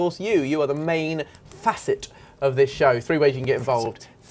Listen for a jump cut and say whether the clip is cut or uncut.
cut